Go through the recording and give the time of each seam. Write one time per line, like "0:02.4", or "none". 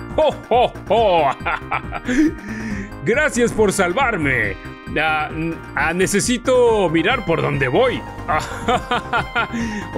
0:05.6
0:08.1